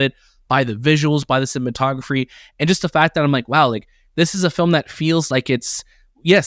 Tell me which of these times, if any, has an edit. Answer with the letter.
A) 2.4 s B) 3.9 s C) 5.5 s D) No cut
D